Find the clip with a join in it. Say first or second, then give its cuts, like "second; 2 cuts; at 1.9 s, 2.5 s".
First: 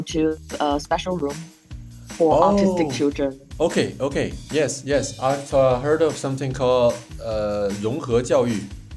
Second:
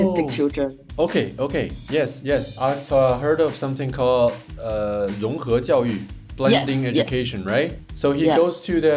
second; 1 cut; at 7.8 s